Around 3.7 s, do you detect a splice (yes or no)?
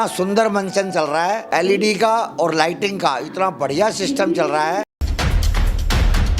no